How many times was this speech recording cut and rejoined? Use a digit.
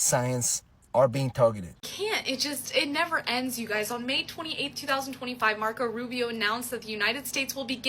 1